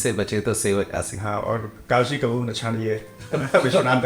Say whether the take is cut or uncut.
uncut